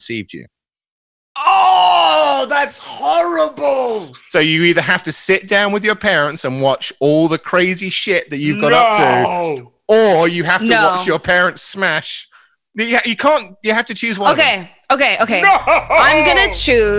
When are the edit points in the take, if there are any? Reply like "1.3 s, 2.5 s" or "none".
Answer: 4.1 s